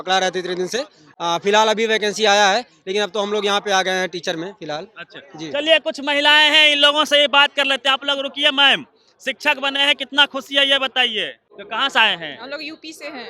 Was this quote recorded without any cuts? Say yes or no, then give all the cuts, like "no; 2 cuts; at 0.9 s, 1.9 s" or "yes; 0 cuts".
yes; 0 cuts